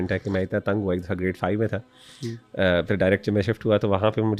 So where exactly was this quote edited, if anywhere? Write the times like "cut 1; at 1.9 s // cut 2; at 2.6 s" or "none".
none

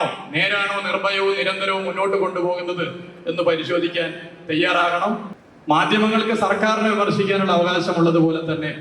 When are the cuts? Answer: cut 1; at 5.3 s

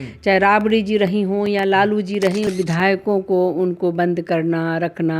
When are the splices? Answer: cut 1; at 2.5 s

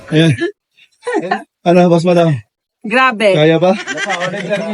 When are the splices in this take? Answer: none

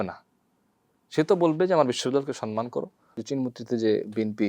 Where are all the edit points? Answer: cut 1; at 3.1 s

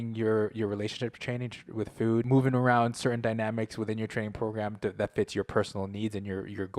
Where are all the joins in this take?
cut 1; at 2.3 s

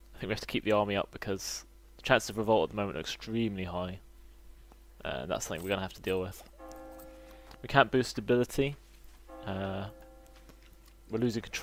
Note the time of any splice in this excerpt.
none

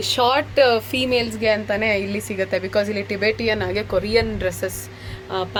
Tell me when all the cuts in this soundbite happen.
none

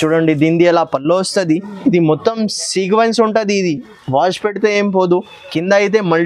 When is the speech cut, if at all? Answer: none

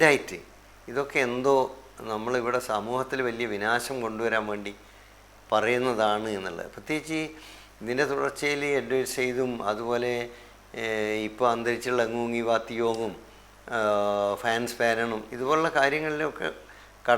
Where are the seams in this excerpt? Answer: none

